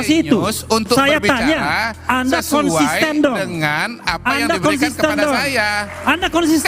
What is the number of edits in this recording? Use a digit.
1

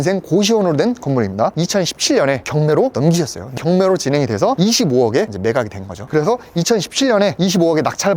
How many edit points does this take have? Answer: 2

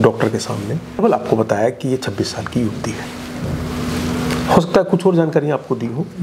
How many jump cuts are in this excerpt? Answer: 1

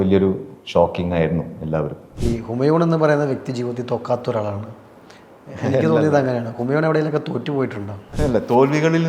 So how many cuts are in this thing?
2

